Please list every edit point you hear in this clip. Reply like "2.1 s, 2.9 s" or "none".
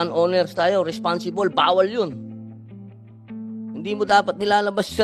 2.6 s, 3.8 s